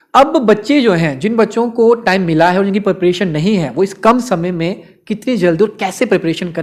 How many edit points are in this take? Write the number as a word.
zero